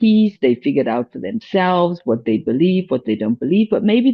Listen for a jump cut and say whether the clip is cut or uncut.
uncut